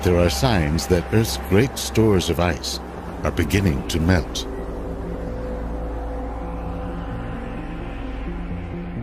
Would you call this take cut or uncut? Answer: cut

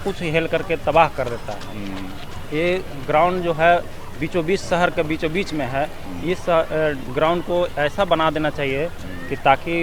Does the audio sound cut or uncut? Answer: uncut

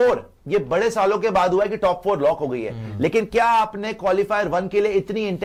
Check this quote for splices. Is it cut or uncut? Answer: uncut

